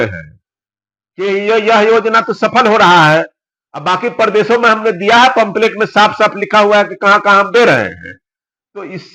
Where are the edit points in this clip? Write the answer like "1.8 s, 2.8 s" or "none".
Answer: none

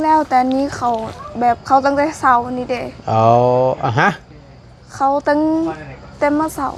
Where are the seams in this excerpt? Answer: none

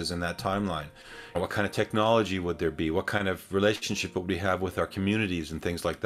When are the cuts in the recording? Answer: 1.4 s

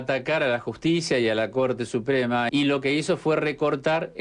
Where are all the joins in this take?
2.5 s

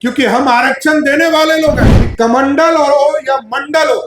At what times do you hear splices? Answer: 1.9 s

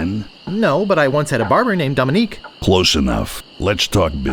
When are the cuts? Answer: 2.5 s, 3.4 s

